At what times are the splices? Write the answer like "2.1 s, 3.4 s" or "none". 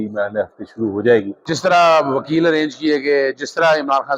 1.4 s